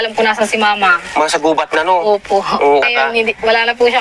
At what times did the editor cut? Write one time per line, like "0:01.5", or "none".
0:01.5
0:02.8